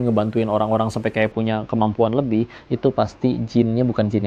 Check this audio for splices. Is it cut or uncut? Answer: uncut